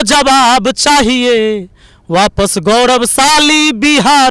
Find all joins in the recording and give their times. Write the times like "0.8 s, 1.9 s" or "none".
none